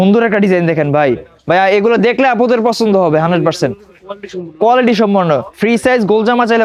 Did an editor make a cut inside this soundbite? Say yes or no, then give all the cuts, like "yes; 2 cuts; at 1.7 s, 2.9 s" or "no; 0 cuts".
no; 0 cuts